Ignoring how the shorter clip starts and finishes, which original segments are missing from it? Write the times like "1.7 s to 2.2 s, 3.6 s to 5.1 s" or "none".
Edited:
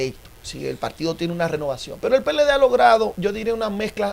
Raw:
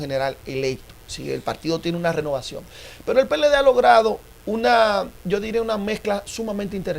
2.5 s to 2.9 s, 4.2 s to 5.2 s